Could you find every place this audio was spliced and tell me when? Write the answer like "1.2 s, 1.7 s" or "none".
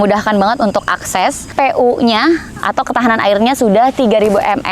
1.5 s

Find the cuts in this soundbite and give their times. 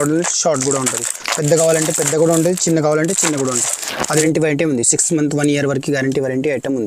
4.2 s

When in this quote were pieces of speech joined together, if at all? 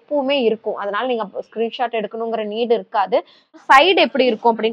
3.6 s

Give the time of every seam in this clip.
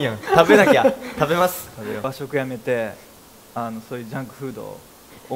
2.1 s

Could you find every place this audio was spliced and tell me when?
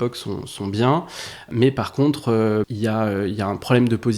1.5 s, 2.7 s

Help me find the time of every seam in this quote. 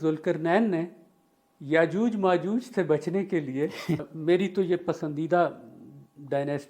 4.1 s

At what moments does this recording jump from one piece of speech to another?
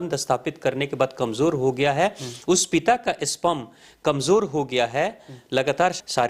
none

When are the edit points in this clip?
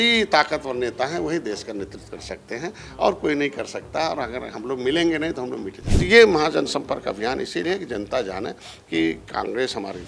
5.8 s

